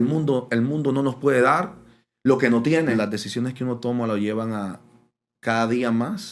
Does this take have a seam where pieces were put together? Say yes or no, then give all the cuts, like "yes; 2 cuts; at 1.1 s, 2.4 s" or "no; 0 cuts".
yes; 1 cut; at 2.9 s